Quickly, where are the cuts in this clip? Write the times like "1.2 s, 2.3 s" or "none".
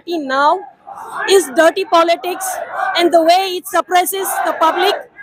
none